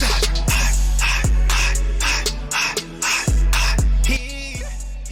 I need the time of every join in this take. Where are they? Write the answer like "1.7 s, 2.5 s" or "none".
none